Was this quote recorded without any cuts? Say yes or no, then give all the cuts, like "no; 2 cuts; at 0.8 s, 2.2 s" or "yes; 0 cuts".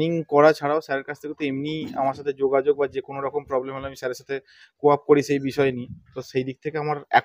yes; 0 cuts